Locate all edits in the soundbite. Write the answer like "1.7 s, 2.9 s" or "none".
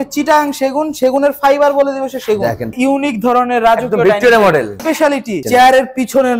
2.7 s, 5.0 s